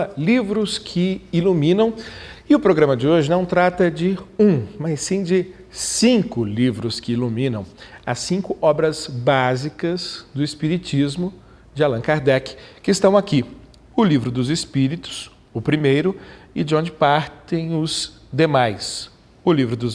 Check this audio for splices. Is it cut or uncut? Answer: uncut